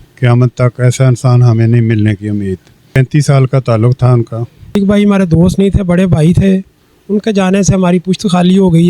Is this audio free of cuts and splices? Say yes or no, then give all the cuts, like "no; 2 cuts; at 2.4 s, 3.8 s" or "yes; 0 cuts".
no; 2 cuts; at 2.9 s, 4.8 s